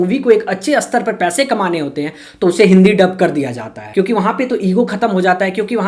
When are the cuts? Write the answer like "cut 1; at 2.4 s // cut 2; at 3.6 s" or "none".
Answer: none